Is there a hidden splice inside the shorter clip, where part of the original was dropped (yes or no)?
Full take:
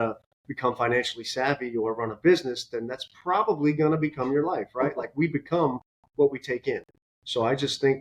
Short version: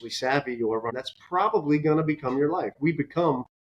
yes